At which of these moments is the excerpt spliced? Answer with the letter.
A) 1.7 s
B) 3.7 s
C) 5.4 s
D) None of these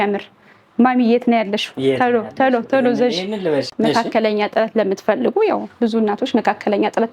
B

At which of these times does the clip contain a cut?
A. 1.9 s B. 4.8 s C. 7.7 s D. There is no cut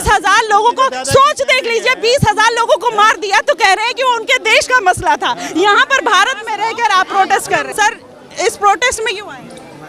C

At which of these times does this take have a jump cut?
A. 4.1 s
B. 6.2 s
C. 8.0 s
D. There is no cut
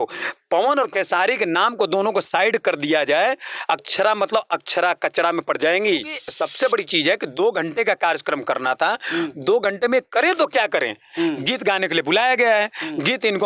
B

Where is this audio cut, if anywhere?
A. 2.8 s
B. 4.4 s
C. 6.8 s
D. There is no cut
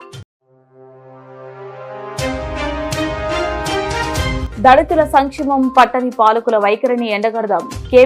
B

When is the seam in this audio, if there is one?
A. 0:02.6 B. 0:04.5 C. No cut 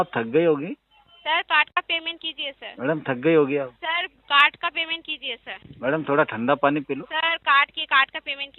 C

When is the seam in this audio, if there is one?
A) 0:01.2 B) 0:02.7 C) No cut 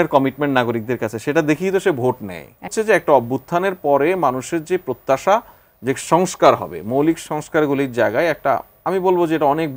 B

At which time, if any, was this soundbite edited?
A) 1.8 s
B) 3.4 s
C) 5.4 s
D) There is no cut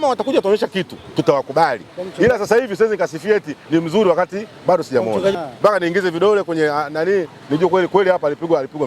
C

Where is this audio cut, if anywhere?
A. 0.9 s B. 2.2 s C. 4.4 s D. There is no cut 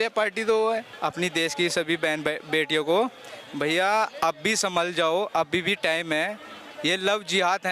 A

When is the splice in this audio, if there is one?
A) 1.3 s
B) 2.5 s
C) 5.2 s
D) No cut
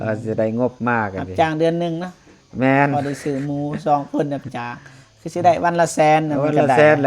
D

